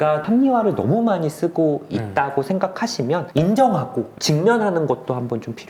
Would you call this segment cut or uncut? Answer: uncut